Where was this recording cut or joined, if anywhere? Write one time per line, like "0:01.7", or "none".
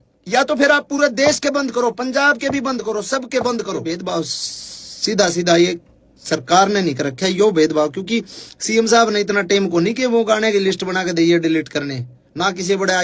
0:04.0